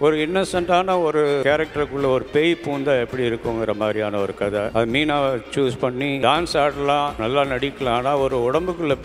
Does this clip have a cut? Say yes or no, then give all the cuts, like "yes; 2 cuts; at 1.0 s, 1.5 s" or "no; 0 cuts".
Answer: yes; 4 cuts; at 1.4 s, 4.7 s, 6.2 s, 7.2 s